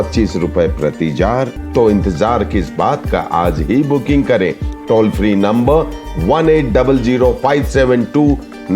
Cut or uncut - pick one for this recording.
cut